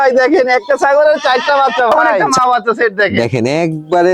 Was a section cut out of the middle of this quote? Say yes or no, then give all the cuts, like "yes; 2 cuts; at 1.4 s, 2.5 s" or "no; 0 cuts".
yes; 1 cut; at 2.1 s